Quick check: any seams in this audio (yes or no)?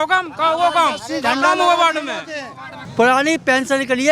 yes